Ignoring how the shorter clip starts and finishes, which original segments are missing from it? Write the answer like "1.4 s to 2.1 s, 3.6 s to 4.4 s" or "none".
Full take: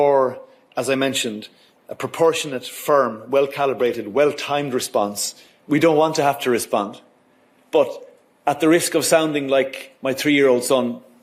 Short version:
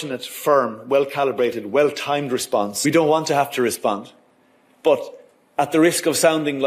5.2 s to 5.6 s